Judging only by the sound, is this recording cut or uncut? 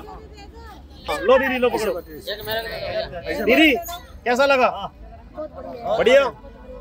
cut